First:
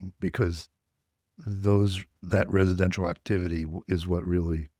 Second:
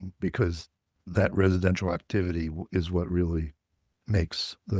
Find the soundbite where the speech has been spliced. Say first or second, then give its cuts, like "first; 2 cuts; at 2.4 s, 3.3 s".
second; 2 cuts; at 0.9 s, 3.9 s